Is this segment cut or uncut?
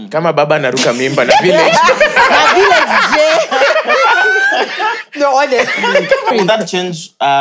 cut